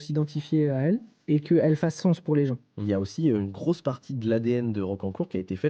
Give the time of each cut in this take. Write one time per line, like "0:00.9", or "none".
0:01.1
0:02.8